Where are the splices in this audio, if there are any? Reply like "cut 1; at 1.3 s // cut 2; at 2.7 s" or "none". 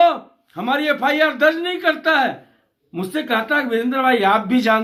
none